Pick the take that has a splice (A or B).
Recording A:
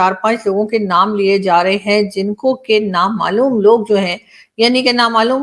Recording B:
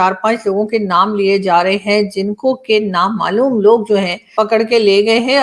B